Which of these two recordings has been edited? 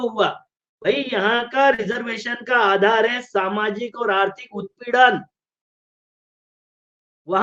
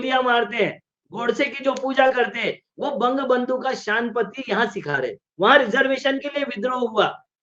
second; 1 cut; at 5.2 s

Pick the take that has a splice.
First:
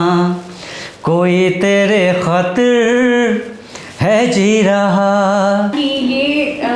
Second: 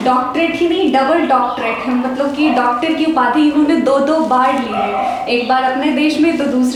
first; 1 cut; at 5.8 s

